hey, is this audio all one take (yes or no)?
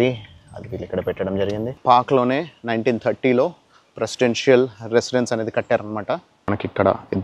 no